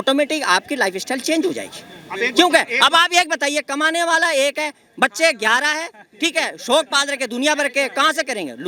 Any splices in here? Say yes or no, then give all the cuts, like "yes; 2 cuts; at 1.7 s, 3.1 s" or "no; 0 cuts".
no; 0 cuts